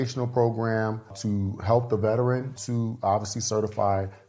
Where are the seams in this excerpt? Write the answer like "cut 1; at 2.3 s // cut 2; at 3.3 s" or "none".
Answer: cut 1; at 1.2 s // cut 2; at 2.6 s

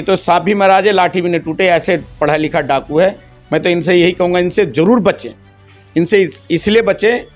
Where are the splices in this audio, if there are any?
none

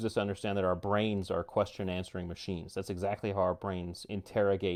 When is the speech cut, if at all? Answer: none

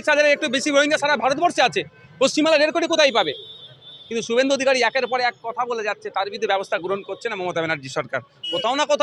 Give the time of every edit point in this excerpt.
none

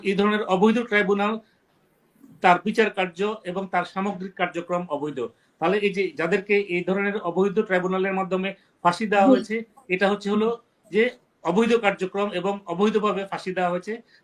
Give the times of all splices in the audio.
none

